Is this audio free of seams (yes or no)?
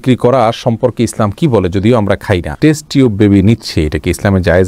no